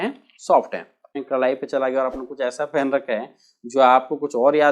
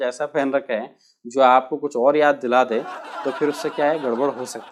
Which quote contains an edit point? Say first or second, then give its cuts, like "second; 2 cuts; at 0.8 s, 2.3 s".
first; 1 cut; at 1.1 s